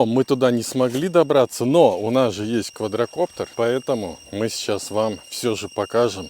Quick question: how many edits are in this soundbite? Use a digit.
1